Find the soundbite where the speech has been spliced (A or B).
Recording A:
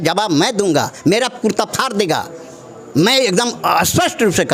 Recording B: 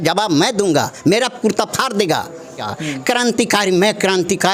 B